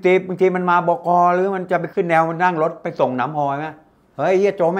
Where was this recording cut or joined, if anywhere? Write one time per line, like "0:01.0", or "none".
0:01.9

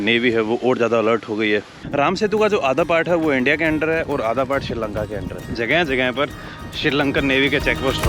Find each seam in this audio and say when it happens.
0:01.8
0:05.2

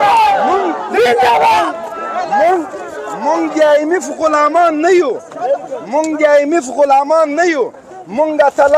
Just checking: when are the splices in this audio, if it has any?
none

